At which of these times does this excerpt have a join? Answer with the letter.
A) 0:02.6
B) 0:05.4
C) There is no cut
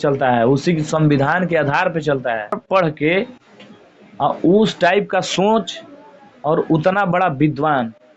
A